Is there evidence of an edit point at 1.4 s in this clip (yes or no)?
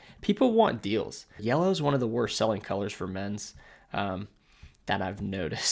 yes